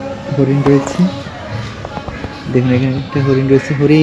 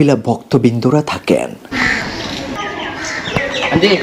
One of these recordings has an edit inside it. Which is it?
second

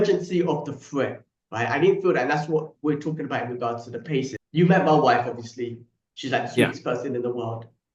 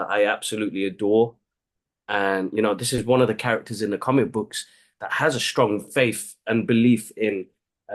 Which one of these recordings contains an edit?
first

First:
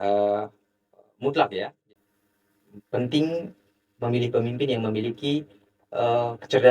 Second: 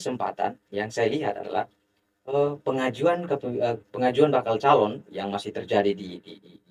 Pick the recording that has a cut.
first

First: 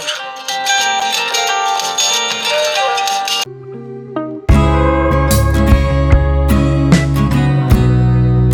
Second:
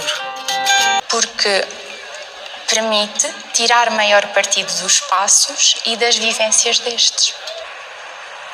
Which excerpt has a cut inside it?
second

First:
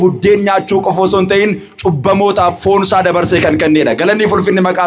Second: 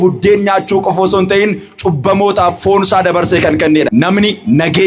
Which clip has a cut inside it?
second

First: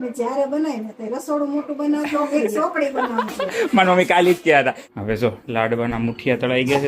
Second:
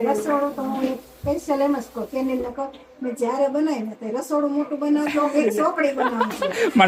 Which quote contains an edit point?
first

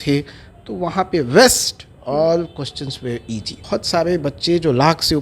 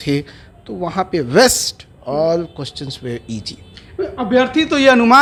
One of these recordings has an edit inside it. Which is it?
first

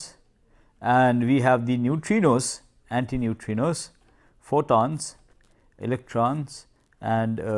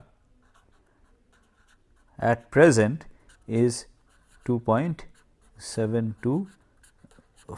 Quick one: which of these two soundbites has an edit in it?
first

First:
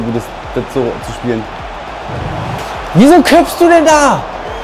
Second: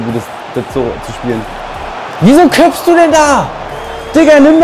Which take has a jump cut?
second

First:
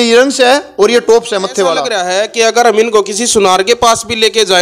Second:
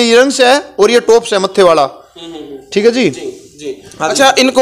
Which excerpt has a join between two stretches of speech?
first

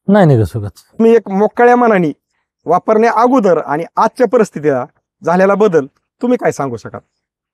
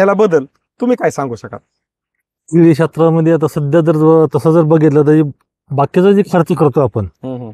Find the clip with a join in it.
first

